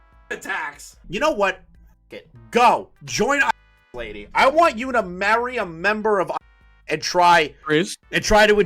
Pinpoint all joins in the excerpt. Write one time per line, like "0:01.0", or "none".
0:00.9